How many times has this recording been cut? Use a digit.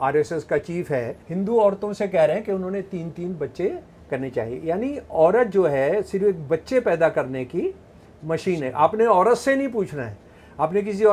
1